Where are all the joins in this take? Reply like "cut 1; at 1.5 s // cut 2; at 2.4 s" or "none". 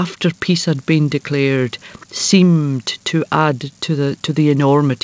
none